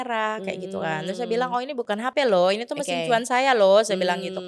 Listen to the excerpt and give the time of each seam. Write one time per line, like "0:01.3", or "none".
0:02.0